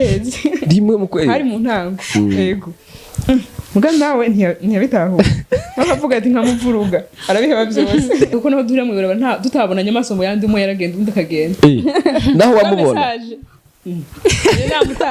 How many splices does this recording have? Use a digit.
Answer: 1